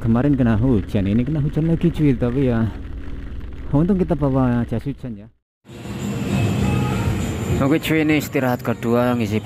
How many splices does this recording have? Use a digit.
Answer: 1